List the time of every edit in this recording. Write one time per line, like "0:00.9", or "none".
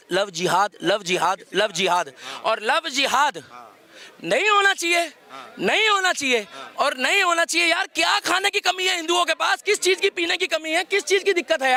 none